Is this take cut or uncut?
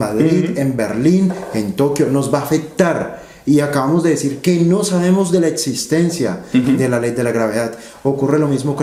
uncut